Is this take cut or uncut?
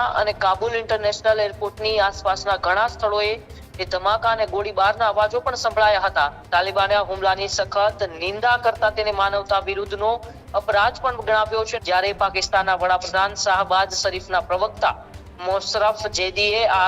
cut